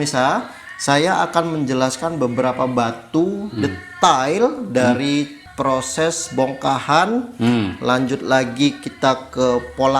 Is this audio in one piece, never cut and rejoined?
no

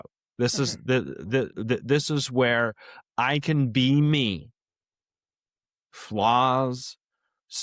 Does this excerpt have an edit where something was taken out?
no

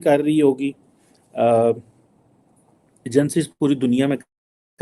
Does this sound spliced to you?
no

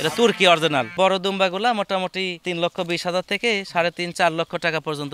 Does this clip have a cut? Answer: yes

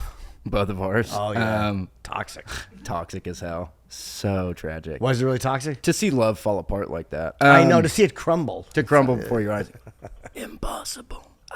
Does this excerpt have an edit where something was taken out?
no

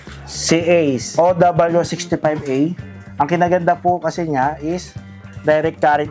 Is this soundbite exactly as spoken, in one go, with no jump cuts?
no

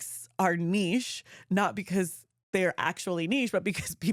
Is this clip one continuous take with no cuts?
yes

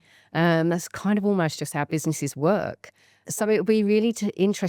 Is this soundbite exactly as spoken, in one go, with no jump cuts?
no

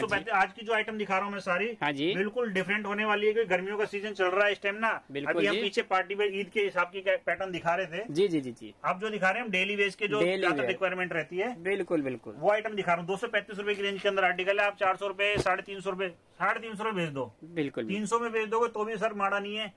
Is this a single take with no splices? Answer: yes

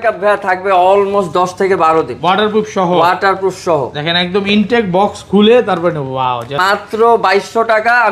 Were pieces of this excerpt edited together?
yes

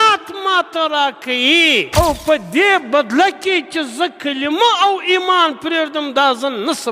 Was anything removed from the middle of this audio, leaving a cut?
yes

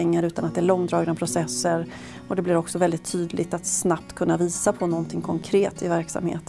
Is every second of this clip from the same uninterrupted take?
yes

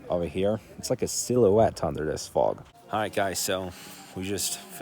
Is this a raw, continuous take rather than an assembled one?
yes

